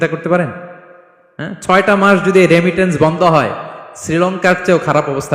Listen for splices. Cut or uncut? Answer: uncut